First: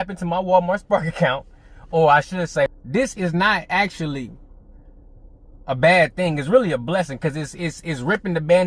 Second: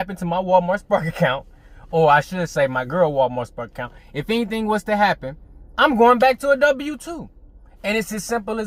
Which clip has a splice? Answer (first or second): first